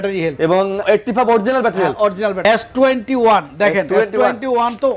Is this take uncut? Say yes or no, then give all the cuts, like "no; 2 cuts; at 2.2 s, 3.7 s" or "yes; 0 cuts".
no; 3 cuts; at 0.8 s, 2.4 s, 3.9 s